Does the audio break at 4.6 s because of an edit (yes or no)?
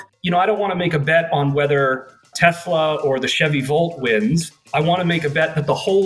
yes